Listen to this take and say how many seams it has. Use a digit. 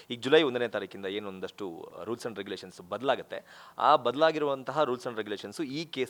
0